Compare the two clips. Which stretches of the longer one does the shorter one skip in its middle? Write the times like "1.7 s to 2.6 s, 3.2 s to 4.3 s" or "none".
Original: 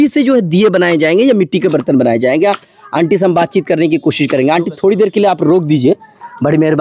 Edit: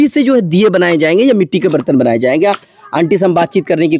none